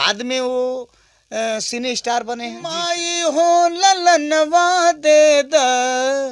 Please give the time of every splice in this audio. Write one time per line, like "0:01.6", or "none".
0:02.8

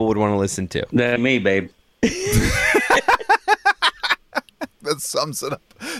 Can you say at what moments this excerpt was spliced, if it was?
0:04.8

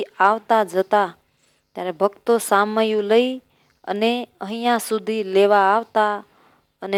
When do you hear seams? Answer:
none

